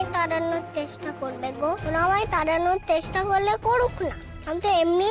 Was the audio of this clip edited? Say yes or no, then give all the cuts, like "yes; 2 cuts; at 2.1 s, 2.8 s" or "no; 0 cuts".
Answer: yes; 1 cut; at 1.8 s